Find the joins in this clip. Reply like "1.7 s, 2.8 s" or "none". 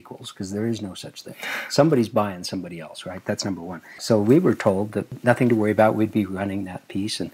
4.0 s, 5.1 s